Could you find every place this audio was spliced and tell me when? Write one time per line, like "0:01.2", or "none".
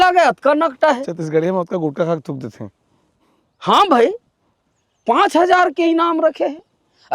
none